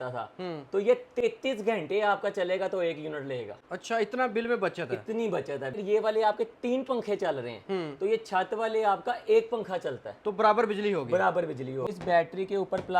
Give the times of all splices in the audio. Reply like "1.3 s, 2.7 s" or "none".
5.8 s, 11.9 s